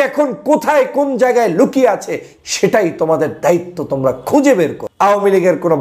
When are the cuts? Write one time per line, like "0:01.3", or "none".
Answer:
0:04.8